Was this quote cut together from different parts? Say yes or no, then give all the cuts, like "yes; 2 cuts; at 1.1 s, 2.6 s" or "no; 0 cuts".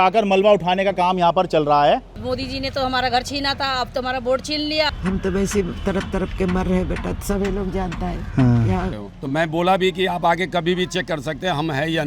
yes; 3 cuts; at 2.2 s, 4.9 s, 9.0 s